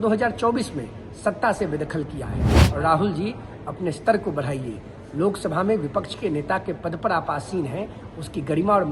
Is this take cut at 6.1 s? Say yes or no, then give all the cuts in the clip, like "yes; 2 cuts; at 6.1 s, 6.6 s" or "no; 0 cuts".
no; 1 cut; at 2.5 s